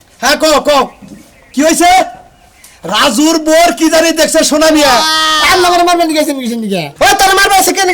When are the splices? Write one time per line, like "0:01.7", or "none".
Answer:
0:05.2